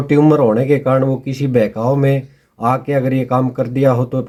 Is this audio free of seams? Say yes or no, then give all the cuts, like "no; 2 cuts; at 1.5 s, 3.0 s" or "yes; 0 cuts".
yes; 0 cuts